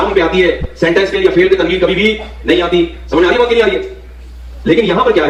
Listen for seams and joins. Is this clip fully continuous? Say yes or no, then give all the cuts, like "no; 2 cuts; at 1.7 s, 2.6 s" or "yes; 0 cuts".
yes; 0 cuts